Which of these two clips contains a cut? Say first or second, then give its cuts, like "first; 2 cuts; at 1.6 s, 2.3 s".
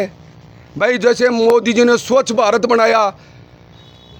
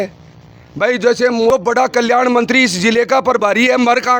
second; 1 cut; at 1.5 s